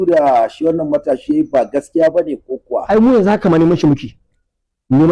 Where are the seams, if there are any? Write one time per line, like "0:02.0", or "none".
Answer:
none